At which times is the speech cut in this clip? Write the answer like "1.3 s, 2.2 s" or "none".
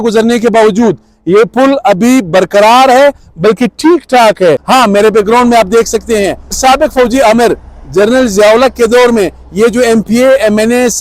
4.6 s, 6.6 s